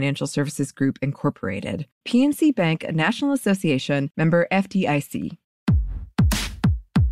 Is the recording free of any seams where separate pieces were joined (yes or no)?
no